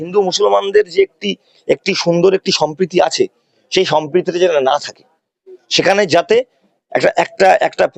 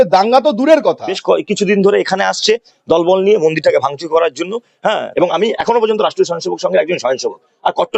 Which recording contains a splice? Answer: second; 2 cuts; at 1.1 s, 5.1 s

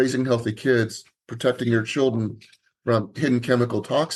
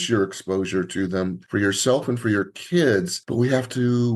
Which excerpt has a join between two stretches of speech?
second; 2 cuts; at 1.4 s, 3.2 s

